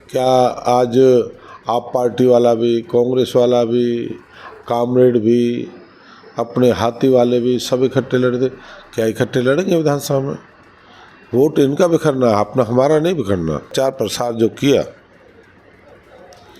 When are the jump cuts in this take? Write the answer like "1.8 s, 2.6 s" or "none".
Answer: 13.7 s

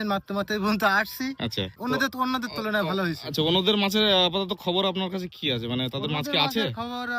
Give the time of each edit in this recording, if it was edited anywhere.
1.6 s

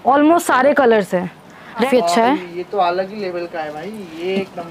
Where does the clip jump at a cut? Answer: 1.9 s

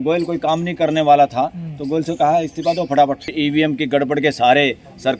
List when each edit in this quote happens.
3.3 s

